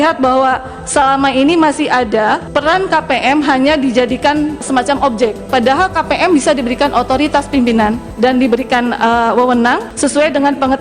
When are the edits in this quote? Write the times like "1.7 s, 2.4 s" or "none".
2.5 s, 4.6 s, 8.1 s, 9.9 s